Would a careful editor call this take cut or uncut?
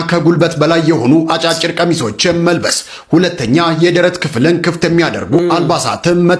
uncut